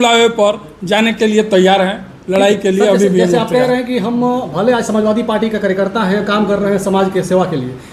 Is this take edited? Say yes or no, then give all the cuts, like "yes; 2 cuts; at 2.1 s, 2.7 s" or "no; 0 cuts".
no; 0 cuts